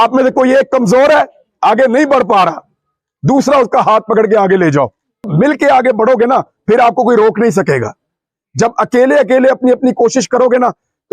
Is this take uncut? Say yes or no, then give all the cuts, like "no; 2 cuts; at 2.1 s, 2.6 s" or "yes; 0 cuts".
no; 1 cut; at 5.3 s